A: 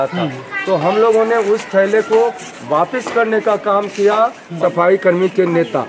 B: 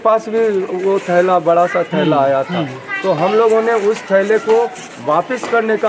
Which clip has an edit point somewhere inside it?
A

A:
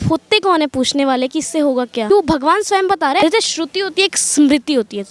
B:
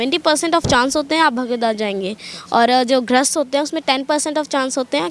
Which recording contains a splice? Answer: A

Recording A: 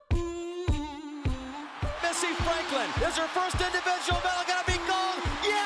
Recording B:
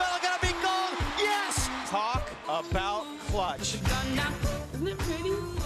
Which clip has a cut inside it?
B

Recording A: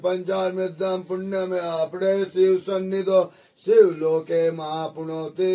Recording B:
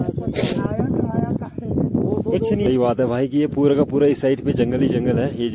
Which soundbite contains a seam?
B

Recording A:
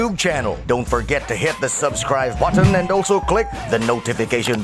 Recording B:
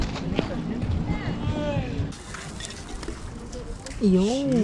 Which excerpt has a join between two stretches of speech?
B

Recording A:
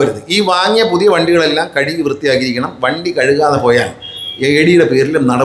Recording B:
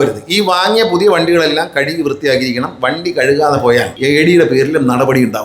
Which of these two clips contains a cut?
B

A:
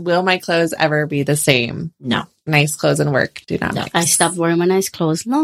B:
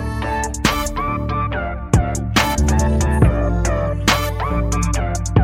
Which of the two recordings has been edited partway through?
A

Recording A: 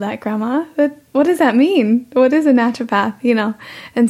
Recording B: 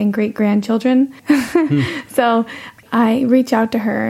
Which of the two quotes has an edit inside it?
B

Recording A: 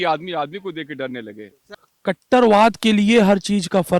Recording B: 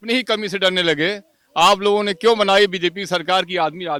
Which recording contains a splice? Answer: A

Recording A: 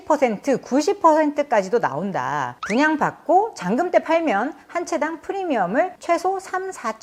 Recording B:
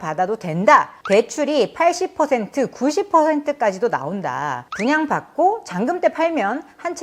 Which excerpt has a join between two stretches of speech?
B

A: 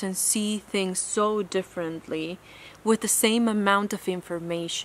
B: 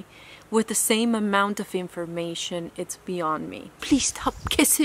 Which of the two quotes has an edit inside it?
B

